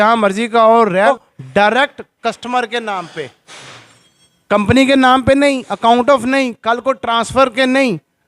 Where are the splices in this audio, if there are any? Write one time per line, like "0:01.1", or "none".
0:01.1